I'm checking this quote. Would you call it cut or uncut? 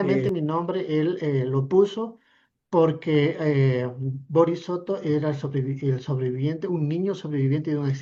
uncut